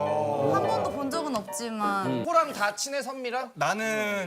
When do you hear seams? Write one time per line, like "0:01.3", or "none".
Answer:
0:02.2

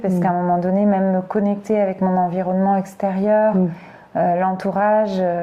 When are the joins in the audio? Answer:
none

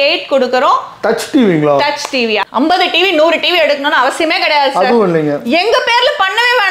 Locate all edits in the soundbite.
0:02.4

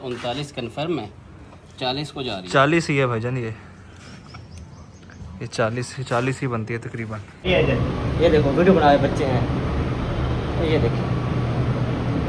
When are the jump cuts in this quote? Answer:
0:07.5

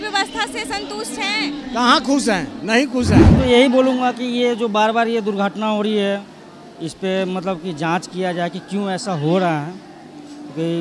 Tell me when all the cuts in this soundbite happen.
0:03.4

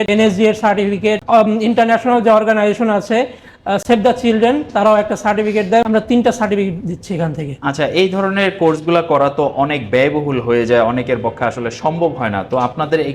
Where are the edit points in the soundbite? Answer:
none

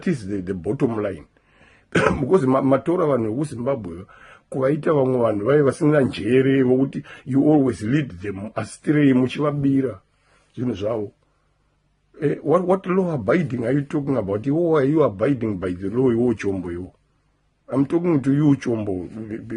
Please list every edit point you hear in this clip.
0:06.5

